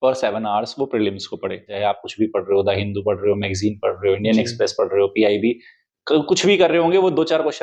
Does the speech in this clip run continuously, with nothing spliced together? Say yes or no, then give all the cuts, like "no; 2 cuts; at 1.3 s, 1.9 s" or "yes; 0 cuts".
no; 1 cut; at 1.7 s